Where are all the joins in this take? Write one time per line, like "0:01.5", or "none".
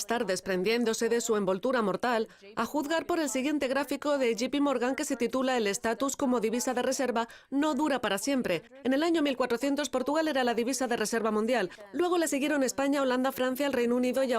0:02.6